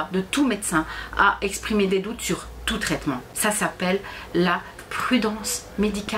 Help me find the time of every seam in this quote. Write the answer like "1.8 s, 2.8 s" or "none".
3.3 s